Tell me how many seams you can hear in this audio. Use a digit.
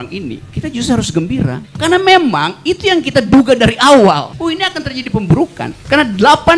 1